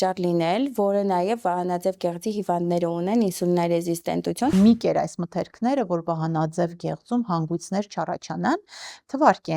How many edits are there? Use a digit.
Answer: 1